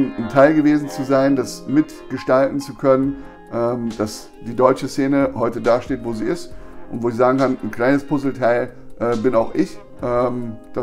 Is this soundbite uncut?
yes; 0 cuts

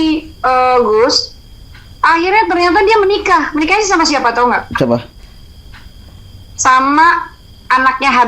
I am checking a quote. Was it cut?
no; 0 cuts

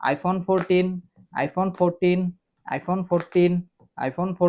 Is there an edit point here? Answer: no; 0 cuts

